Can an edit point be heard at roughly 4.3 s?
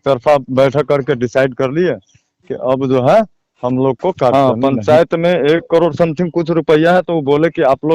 yes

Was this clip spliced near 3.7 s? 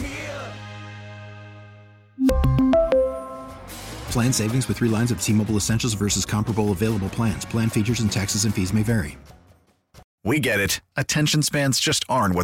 no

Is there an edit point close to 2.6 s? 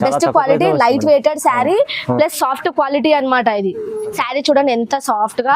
no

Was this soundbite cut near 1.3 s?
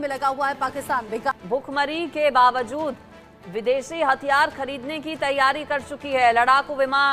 yes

